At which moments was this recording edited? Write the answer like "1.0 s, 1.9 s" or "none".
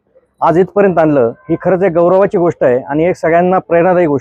none